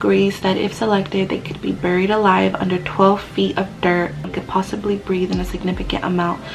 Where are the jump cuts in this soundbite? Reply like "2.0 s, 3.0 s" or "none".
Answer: 4.4 s